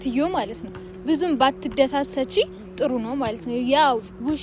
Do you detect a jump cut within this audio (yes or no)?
no